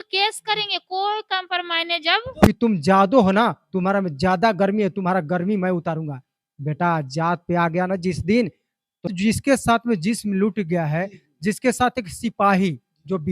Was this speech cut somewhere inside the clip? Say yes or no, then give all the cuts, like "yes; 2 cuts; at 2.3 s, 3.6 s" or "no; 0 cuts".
yes; 2 cuts; at 2.5 s, 9.1 s